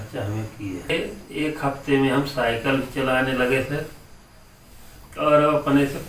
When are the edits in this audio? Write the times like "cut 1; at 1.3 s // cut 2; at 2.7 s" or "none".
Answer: cut 1; at 0.9 s